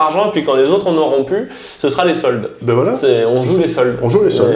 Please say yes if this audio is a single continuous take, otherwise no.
yes